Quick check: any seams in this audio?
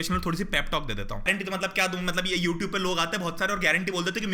yes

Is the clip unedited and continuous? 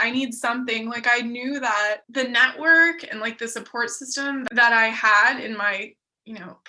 no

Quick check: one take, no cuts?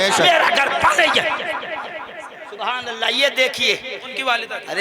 yes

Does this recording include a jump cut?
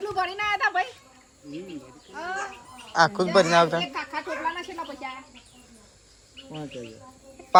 no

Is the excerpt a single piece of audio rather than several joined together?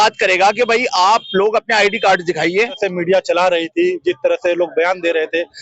no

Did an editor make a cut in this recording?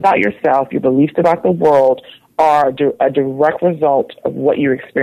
no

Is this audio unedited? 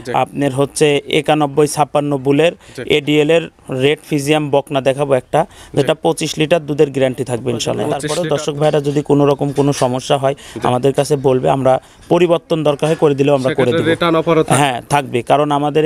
no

